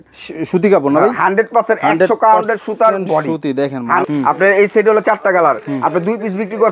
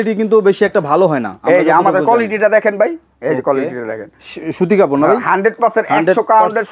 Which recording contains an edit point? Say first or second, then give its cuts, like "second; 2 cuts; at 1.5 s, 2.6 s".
first; 1 cut; at 4.0 s